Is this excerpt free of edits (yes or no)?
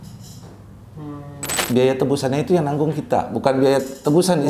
no